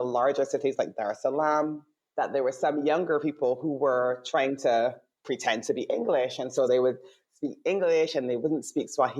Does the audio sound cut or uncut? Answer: uncut